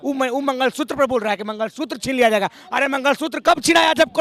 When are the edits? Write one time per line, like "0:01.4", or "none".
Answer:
none